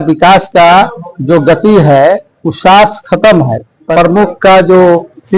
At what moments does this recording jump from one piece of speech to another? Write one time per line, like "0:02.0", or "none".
0:03.9